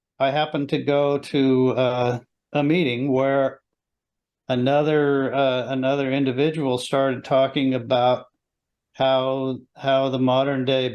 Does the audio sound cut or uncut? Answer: uncut